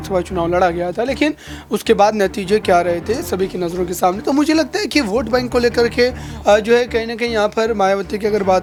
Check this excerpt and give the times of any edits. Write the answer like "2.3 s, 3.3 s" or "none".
none